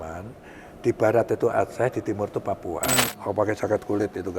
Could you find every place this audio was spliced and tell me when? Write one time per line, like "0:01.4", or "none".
0:03.1